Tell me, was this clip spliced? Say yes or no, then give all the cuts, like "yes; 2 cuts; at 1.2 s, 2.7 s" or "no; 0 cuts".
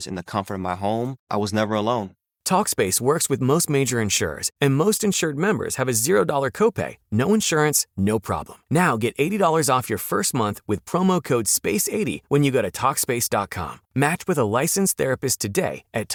no; 0 cuts